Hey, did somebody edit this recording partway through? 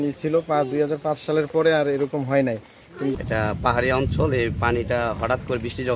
yes; 1 cut; at 3.1 s

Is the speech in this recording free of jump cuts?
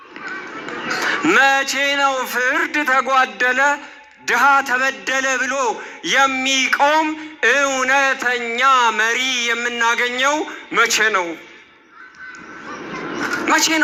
yes; 0 cuts

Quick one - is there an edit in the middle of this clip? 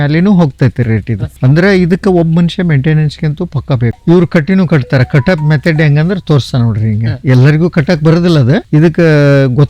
yes; 2 cuts; at 4.0 s, 8.6 s

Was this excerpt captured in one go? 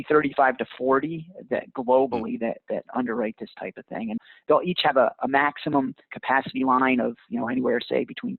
no; 1 cut; at 4.2 s

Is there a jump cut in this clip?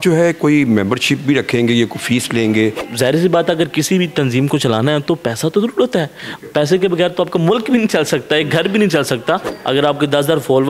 yes; 2 cuts; at 2.8 s, 9.5 s

